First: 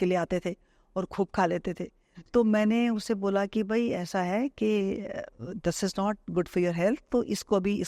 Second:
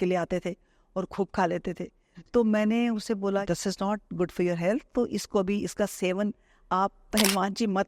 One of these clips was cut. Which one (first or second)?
second